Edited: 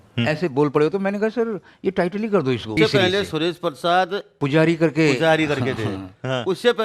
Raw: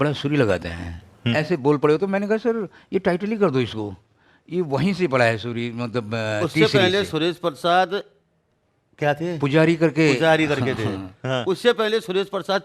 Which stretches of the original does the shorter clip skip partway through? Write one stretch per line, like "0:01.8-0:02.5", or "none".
0:03.8-0:06.5
0:08.1-0:09.3